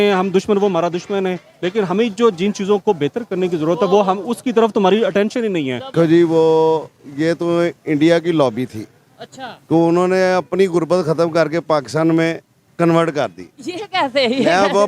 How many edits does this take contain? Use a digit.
1